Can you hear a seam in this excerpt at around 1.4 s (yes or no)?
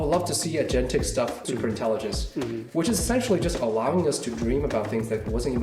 yes